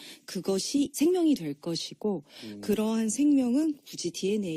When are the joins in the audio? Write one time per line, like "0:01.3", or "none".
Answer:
none